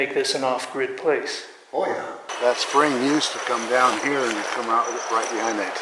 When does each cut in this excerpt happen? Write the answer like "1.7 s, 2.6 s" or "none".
2.2 s